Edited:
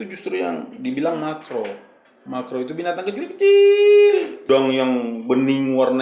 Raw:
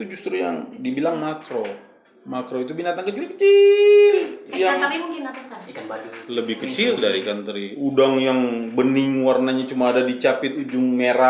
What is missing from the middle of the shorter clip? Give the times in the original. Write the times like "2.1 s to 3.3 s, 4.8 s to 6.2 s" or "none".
4.4 s to 7.9 s